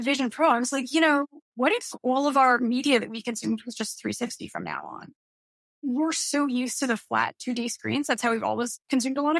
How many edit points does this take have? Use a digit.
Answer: 1